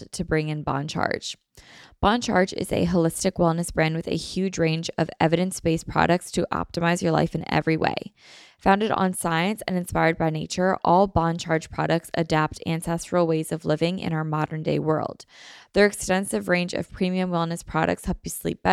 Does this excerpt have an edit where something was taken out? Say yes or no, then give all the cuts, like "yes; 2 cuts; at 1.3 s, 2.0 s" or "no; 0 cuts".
no; 0 cuts